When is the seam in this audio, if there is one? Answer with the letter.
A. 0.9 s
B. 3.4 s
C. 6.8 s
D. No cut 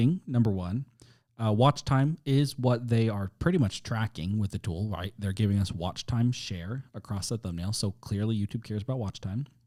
D